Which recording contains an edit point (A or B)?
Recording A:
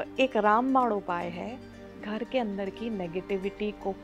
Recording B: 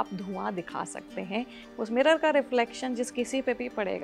B